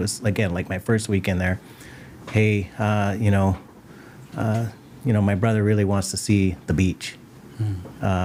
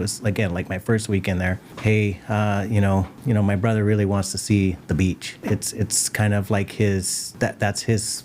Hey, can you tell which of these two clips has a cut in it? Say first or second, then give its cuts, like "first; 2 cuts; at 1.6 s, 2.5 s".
second; 4 cuts; at 1.7 s, 3.1 s, 5.4 s, 7.2 s